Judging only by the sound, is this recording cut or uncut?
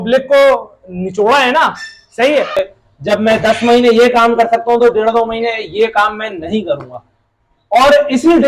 cut